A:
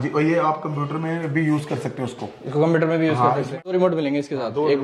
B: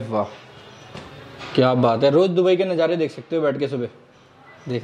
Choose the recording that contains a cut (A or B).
A